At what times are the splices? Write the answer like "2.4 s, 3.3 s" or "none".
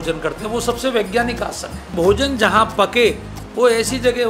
1.9 s

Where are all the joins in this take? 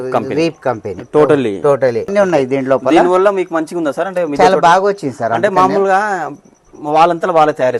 2.1 s

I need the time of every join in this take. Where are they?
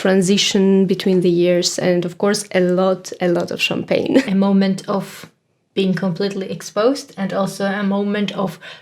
4.3 s

